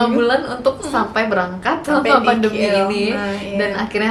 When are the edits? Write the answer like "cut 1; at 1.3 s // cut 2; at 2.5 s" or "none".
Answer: none